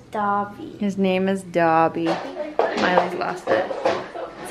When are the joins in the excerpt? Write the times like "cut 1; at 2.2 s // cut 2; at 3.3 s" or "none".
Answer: cut 1; at 2.0 s